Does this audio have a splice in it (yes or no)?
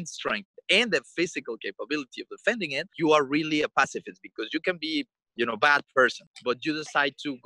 yes